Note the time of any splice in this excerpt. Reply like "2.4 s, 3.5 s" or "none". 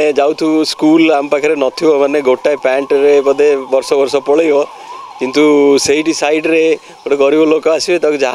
none